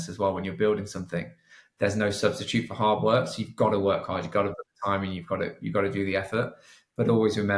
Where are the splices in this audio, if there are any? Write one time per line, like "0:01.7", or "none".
none